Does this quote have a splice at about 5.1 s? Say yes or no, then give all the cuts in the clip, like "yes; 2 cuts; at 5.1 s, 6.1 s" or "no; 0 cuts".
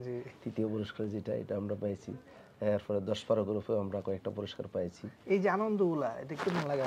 no; 0 cuts